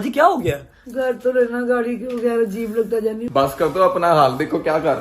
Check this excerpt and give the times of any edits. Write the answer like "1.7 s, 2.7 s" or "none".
3.2 s